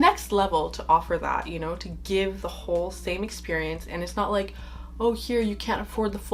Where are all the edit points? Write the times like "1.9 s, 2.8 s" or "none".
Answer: none